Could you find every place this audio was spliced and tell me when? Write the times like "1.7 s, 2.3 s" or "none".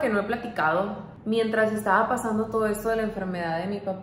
1.1 s